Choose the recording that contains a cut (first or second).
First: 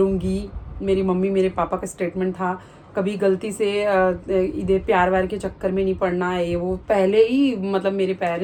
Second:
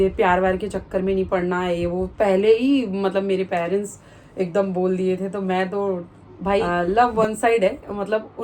second